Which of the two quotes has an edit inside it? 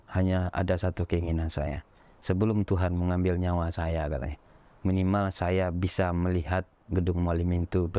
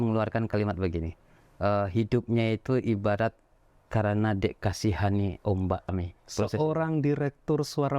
second; 1 cut; at 5.9 s

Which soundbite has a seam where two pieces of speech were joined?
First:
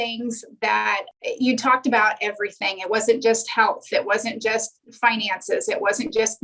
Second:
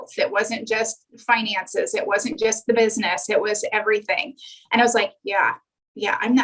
first; 1 cut; at 1.1 s

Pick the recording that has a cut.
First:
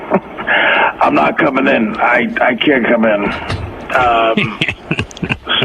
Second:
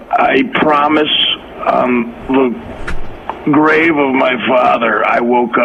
first; 1 cut; at 1.5 s

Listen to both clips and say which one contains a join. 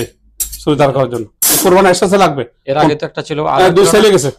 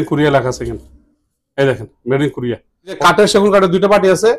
second; 1 cut; at 3.0 s

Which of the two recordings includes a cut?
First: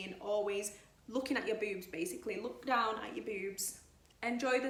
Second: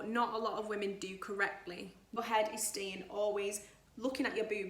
second; 1 cut; at 2.0 s

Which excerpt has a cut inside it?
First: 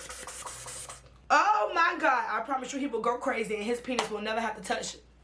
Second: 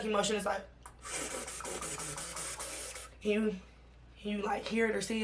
first; 1 cut; at 1.2 s

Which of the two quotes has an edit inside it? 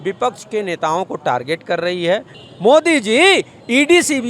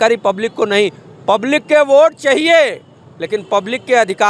first; 1 cut; at 2.4 s

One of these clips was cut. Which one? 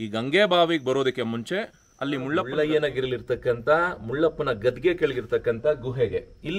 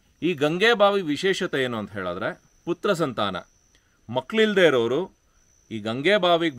first; 1 cut; at 2.5 s

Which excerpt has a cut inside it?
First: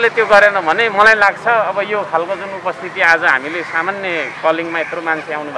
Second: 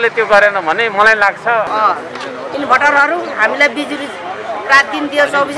second; 1 cut; at 1.7 s

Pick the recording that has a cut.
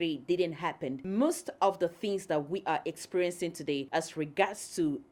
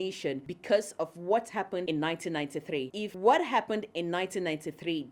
second; 1 cut; at 2.9 s

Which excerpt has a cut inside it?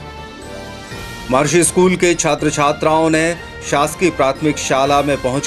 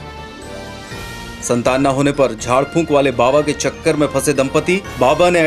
first; 1 cut; at 1.1 s

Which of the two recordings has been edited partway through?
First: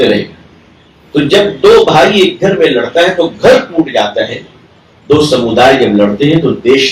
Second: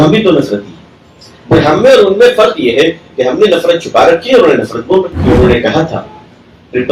second; 1 cut; at 5.2 s

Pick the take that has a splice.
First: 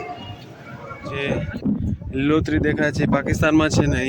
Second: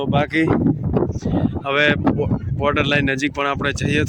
first; 1 cut; at 1.1 s

